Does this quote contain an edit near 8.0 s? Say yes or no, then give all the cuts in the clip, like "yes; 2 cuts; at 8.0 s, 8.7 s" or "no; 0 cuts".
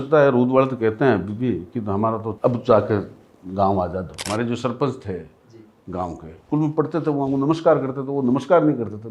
no; 3 cuts; at 2.3 s, 4.3 s, 6.3 s